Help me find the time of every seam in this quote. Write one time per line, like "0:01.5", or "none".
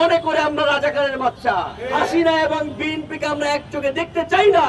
0:01.8